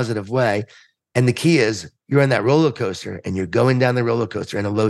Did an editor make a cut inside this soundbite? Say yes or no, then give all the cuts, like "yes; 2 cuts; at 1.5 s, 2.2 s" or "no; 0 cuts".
no; 0 cuts